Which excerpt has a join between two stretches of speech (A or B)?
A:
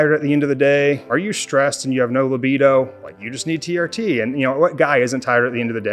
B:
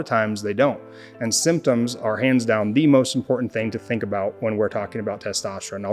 A